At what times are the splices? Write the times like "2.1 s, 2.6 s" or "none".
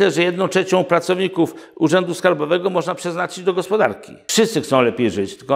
4.2 s